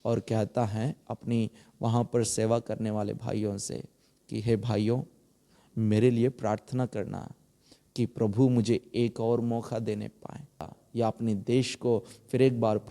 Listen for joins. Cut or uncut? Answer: cut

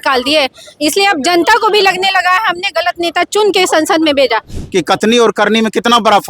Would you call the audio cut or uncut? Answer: cut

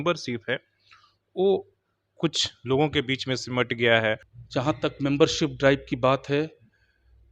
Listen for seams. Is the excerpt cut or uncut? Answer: cut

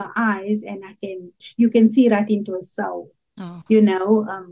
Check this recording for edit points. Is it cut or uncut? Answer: cut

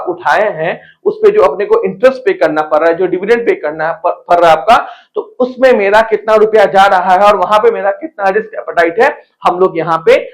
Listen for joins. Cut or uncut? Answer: uncut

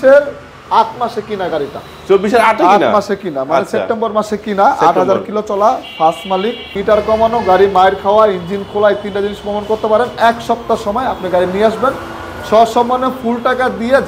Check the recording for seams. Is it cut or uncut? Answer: cut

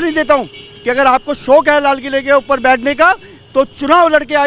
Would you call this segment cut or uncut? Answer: uncut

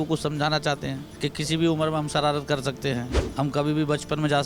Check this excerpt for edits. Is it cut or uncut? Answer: cut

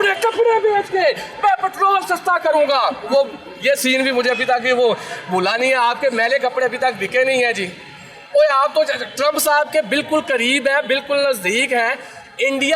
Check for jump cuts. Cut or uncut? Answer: uncut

